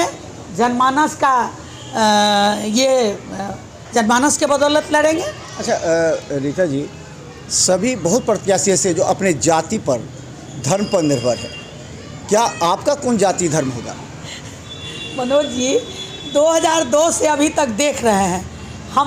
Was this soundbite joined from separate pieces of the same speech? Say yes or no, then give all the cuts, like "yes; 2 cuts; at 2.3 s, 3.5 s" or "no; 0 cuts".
no; 0 cuts